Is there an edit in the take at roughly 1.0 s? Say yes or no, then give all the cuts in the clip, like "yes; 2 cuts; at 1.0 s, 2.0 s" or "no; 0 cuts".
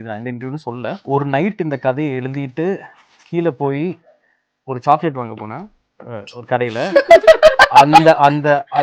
yes; 1 cut; at 1.0 s